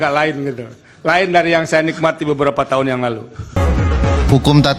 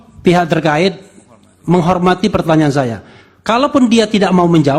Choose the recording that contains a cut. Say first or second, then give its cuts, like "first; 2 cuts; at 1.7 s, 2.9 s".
first; 1 cut; at 3.6 s